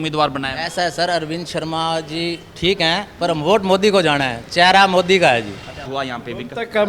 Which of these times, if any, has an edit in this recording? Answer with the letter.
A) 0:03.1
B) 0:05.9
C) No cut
B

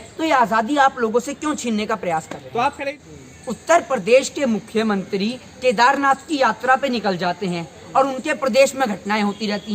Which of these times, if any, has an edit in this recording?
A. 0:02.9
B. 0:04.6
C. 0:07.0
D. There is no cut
A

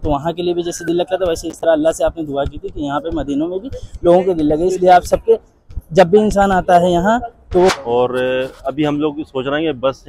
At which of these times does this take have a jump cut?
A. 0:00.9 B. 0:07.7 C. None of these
B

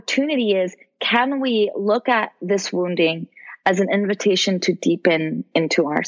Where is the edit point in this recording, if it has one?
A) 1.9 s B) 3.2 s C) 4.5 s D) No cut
D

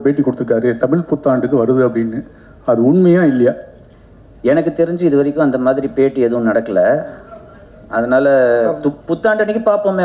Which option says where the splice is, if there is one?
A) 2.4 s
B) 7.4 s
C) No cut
C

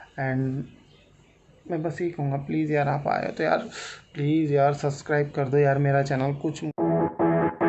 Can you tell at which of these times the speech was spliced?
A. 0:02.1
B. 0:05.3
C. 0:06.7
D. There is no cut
C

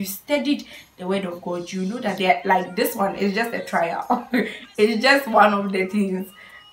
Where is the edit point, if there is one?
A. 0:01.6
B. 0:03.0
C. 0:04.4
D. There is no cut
D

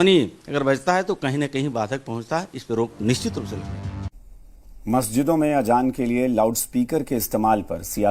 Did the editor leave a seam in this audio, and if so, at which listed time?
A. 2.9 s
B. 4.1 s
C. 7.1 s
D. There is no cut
B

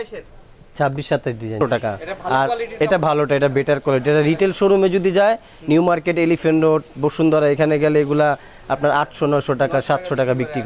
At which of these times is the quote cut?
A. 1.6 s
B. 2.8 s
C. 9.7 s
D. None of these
A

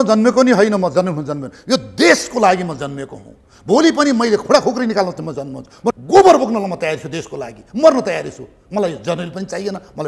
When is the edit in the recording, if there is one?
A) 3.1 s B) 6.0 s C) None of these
B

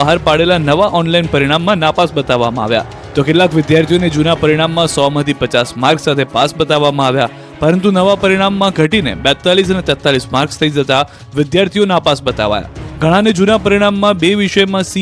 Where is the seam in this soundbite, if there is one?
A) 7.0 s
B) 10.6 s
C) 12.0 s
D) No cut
A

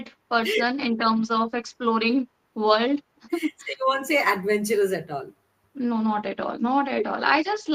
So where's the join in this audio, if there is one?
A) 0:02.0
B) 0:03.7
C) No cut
C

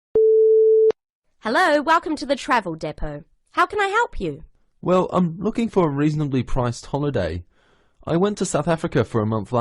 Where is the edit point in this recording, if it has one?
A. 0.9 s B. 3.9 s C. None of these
A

